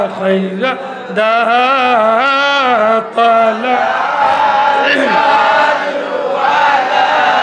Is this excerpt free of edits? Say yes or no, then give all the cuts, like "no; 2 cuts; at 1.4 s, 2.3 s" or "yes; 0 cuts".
yes; 0 cuts